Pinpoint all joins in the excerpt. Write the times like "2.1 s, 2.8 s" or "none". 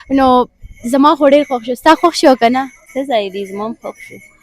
2.9 s